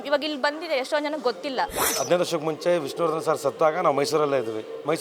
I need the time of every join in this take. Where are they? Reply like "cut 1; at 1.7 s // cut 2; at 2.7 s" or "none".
cut 1; at 1.9 s